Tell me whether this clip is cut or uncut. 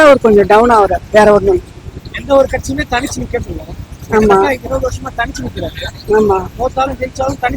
uncut